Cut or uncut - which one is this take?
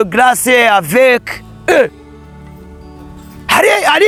uncut